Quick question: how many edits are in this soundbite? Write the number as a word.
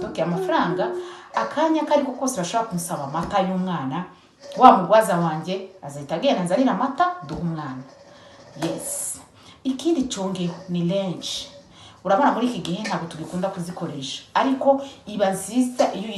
zero